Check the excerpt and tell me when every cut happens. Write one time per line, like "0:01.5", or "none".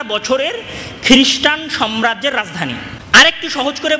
0:02.9